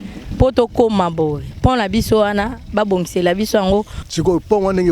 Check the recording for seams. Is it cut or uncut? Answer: cut